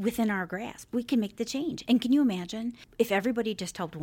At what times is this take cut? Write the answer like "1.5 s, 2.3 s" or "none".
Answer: 2.8 s